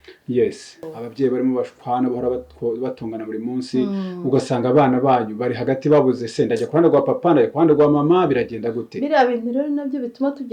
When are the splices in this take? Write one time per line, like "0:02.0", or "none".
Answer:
0:01.0